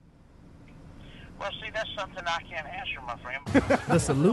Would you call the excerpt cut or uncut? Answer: cut